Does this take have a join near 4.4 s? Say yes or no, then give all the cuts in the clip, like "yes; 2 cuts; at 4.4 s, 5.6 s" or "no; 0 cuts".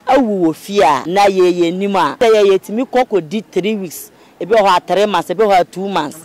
no; 2 cuts; at 1.0 s, 2.2 s